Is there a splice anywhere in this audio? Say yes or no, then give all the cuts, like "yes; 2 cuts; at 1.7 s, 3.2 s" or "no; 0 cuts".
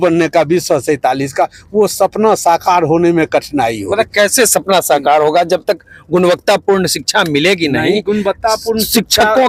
no; 0 cuts